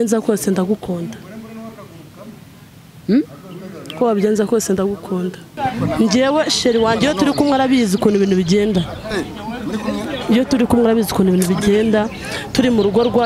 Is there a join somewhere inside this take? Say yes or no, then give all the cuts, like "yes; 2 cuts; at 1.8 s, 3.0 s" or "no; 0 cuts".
yes; 1 cut; at 5.6 s